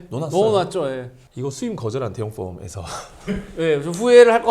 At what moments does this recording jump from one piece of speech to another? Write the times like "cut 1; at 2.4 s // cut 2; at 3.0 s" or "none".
cut 1; at 1.1 s